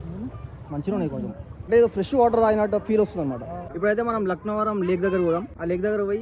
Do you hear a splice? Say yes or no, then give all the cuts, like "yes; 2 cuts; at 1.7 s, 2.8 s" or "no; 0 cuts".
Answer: yes; 2 cuts; at 1.5 s, 3.6 s